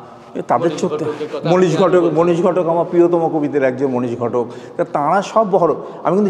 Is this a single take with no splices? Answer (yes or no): yes